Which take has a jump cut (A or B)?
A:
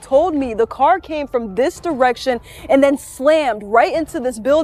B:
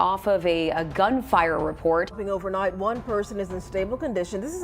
B